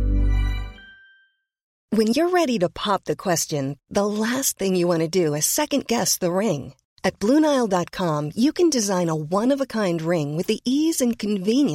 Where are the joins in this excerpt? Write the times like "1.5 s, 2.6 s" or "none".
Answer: 1.7 s